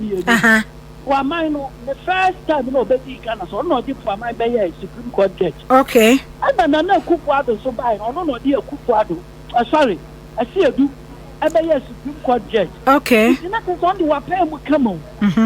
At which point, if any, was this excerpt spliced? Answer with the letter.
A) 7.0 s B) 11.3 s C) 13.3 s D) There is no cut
C